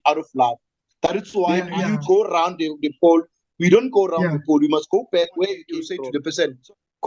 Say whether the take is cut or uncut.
cut